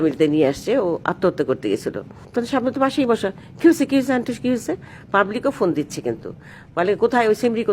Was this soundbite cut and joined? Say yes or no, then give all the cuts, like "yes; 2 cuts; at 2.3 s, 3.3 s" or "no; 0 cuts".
yes; 2 cuts; at 2.1 s, 4.9 s